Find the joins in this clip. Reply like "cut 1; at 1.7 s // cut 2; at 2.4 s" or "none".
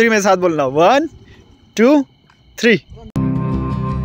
none

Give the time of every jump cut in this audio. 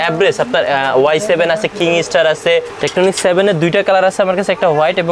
cut 1; at 2.8 s

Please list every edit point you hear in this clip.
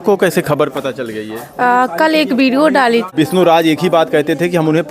cut 1; at 3.1 s

